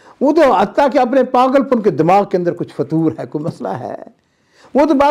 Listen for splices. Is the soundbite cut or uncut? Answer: uncut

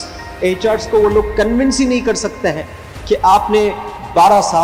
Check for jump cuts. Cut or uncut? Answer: uncut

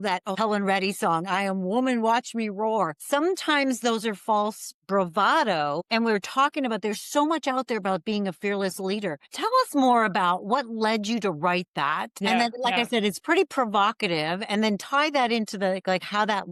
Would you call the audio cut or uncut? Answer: uncut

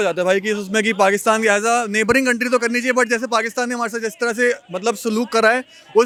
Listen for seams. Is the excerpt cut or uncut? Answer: uncut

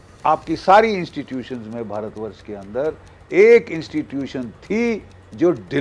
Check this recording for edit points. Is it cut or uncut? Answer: uncut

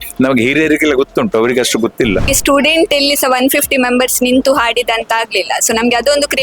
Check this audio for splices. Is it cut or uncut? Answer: cut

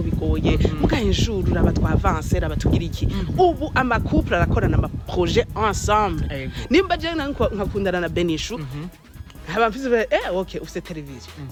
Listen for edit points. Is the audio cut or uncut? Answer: uncut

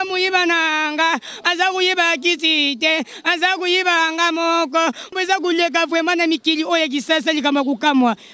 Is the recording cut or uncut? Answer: cut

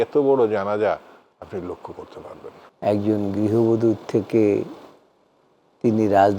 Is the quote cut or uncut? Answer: cut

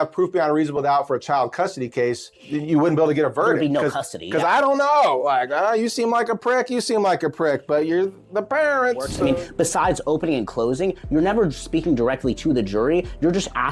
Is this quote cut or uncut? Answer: cut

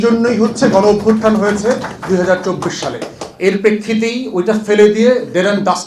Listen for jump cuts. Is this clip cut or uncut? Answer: uncut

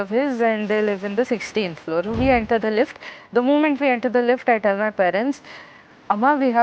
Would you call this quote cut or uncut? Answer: uncut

